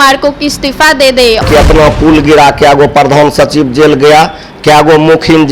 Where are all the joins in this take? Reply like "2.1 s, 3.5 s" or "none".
1.4 s